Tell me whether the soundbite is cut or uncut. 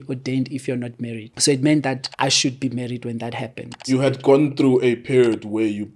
cut